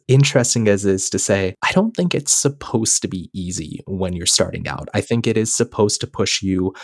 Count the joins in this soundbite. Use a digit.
1